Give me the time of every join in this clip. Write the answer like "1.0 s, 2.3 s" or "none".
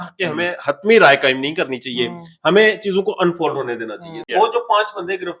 4.2 s